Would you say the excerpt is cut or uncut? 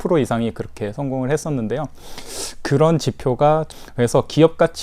cut